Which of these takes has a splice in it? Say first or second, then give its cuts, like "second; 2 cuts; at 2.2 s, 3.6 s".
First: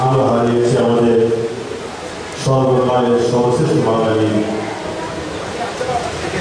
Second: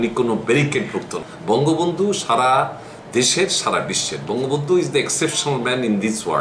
second; 1 cut; at 1.3 s